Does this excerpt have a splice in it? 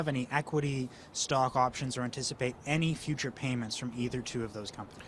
no; 0 cuts

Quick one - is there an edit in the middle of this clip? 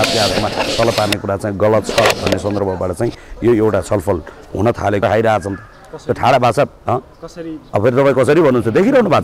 yes; 1 cut; at 5.0 s

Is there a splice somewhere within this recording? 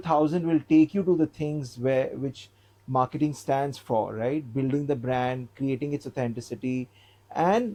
no; 0 cuts

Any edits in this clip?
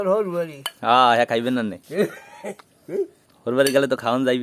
no; 0 cuts

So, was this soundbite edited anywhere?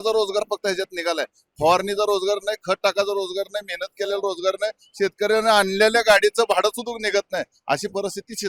no; 0 cuts

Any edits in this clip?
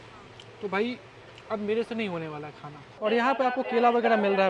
yes; 1 cut; at 2.9 s

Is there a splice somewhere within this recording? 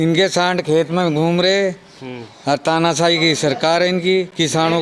no; 0 cuts

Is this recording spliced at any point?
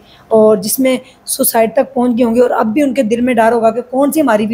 no; 0 cuts

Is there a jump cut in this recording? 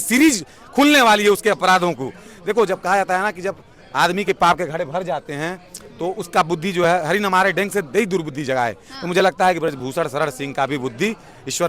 no; 0 cuts

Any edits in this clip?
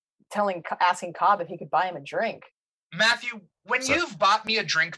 yes; 1 cut; at 2.5 s

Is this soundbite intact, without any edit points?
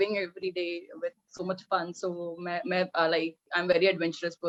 yes; 0 cuts

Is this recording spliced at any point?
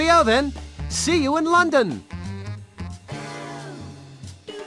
yes; 1 cut; at 2.1 s

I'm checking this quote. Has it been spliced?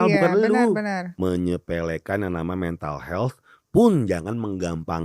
yes; 1 cut; at 1.0 s

